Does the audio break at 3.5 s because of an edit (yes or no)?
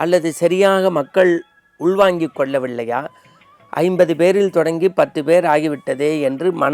no